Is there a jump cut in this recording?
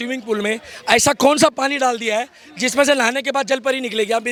no; 0 cuts

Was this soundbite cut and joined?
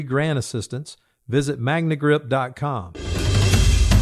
yes; 1 cut; at 3.1 s

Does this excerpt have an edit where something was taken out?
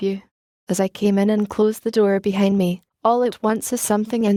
no; 0 cuts

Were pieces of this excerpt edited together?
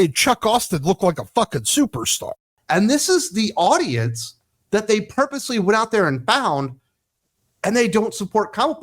yes; 1 cut; at 2.5 s

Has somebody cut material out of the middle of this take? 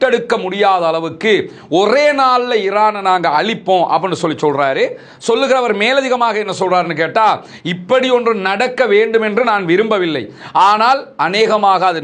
no; 0 cuts

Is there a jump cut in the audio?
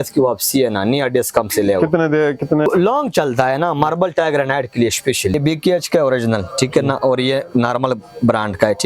yes; 2 cuts; at 2.6 s, 5.3 s

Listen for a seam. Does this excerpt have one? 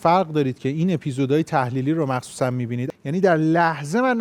yes; 1 cut; at 2.8 s

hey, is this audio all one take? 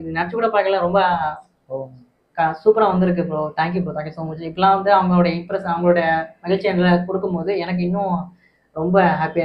yes; 0 cuts

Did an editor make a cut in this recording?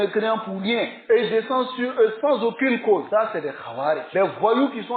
no; 0 cuts

